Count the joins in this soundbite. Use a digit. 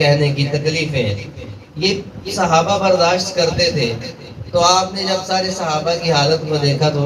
0